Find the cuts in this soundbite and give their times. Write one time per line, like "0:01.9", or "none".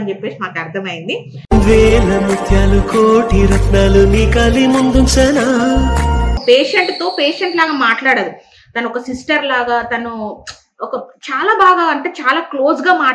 0:06.3